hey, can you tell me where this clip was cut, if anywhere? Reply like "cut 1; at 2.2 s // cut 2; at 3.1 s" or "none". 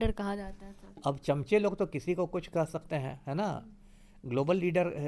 none